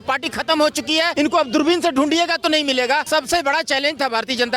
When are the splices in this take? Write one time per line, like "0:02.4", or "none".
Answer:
0:01.1
0:03.0